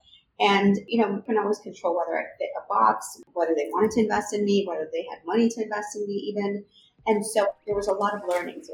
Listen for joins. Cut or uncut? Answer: cut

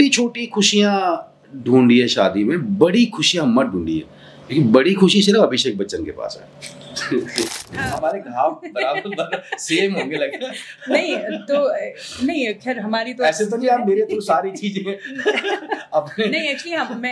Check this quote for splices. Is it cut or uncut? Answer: cut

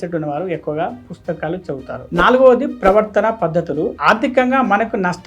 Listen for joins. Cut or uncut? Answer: uncut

